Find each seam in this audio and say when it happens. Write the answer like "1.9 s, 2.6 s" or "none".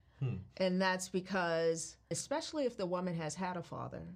2.1 s